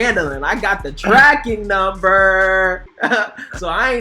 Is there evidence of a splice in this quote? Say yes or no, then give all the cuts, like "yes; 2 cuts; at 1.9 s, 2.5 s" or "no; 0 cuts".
yes; 1 cut; at 2.9 s